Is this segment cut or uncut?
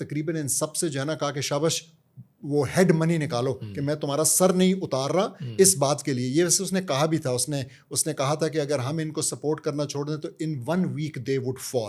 uncut